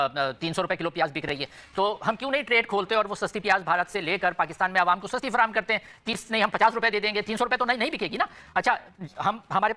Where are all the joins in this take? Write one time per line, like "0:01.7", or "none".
none